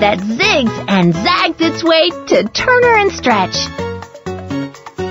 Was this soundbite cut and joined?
no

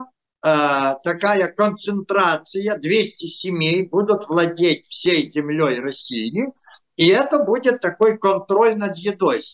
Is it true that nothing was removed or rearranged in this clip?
yes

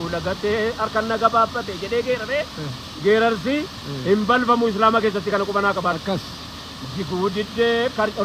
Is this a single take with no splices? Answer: yes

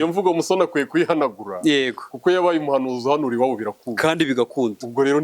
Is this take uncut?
yes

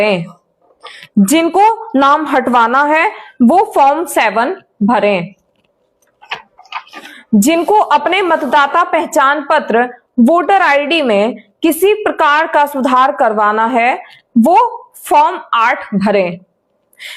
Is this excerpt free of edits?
yes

